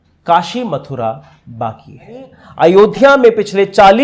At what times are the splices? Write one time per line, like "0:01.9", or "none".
0:02.4